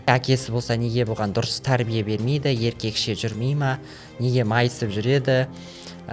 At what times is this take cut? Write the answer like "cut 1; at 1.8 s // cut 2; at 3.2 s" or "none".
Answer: none